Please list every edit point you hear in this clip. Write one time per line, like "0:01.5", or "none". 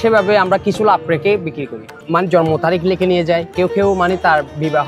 0:01.9